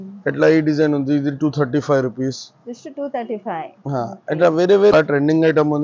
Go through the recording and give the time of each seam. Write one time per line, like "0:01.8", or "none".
0:04.9

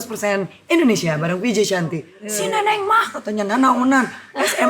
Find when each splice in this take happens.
0:02.1

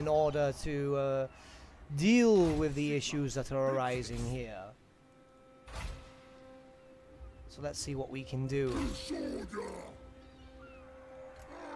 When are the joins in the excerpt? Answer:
none

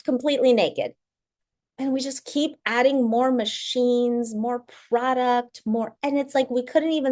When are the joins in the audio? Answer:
none

